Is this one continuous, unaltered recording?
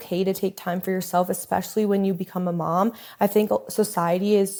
yes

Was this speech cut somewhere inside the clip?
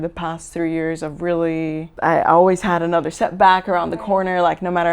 yes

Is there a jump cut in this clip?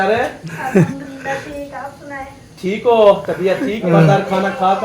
yes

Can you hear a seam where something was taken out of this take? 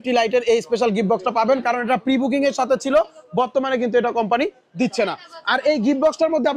no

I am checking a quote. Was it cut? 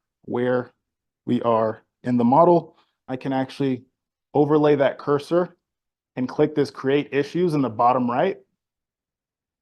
yes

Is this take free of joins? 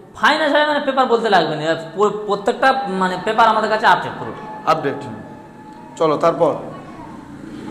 yes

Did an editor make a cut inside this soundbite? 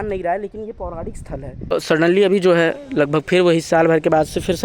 yes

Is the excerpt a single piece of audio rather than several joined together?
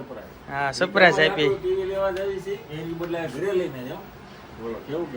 yes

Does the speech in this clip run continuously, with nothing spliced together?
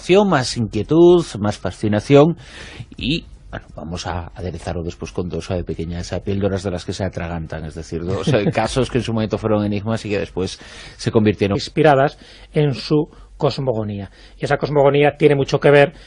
yes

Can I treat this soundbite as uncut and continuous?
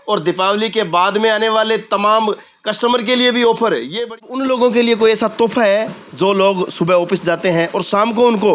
no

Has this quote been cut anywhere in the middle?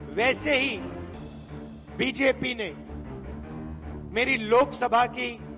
yes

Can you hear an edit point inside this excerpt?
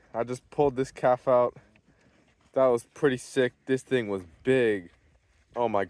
no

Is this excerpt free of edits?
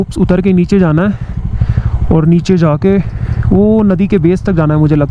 yes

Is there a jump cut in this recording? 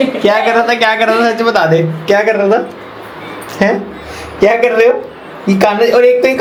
no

